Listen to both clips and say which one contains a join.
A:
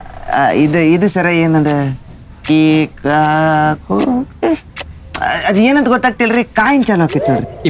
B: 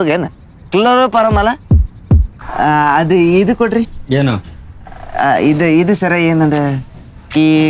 B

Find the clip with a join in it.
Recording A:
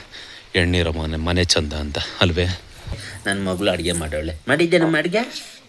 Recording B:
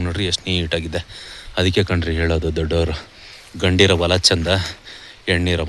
A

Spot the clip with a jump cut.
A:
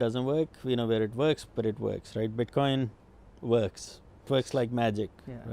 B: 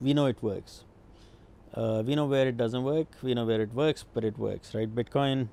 A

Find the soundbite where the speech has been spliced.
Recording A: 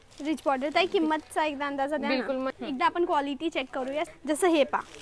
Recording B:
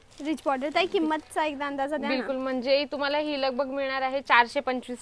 A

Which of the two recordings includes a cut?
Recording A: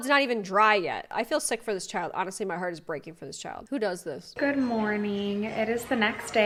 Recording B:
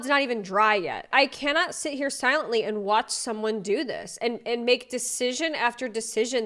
B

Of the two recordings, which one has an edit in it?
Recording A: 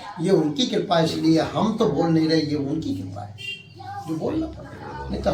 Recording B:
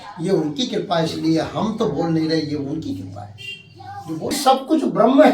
B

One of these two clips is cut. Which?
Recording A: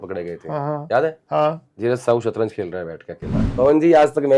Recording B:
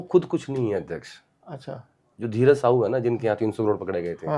A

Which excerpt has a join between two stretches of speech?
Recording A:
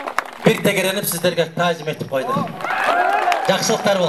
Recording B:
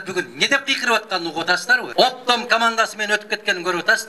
B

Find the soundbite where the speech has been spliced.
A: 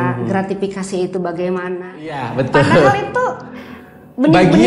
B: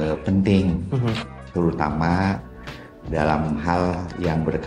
A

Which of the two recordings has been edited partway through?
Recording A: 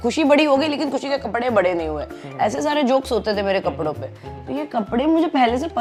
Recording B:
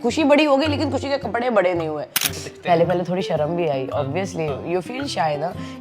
B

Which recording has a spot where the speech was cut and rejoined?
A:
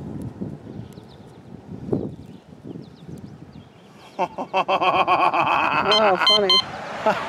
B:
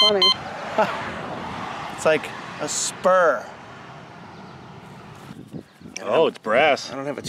B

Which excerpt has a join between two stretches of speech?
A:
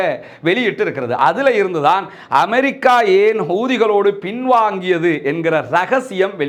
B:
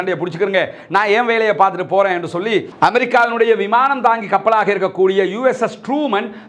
B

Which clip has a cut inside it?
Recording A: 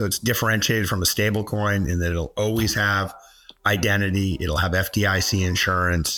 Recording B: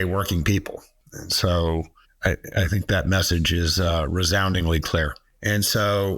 B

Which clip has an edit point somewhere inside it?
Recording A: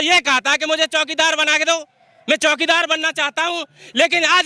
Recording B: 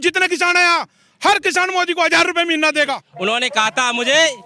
B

